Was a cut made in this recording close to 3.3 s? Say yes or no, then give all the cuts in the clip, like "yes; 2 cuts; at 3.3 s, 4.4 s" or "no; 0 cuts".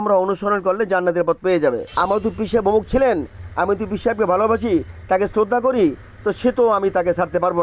no; 1 cut; at 1.9 s